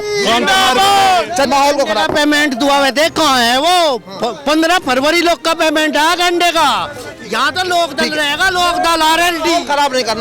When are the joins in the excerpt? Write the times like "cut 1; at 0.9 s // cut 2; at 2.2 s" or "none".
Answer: cut 1; at 1.5 s